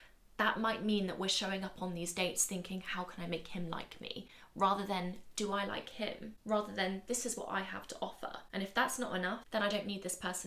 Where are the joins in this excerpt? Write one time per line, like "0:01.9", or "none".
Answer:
0:06.3
0:08.4
0:09.4